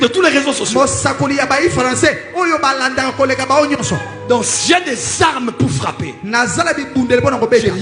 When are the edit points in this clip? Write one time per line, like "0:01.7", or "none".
none

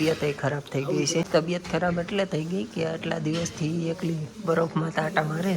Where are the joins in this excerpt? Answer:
0:01.3

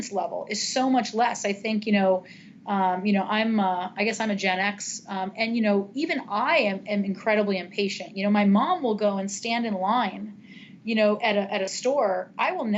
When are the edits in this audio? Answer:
none

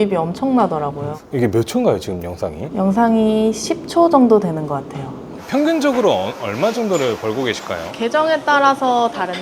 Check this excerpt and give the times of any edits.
0:05.0

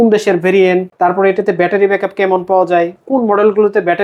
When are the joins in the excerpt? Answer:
0:00.9

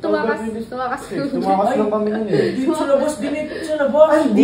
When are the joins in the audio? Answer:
none

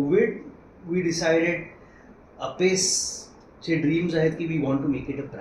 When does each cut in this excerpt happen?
none

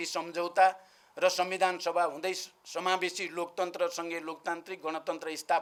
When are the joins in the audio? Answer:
none

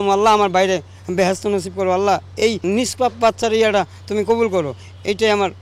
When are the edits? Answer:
0:02.6

